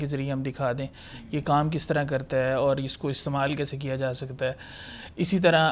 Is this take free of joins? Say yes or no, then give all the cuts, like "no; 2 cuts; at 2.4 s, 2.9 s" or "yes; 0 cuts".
yes; 0 cuts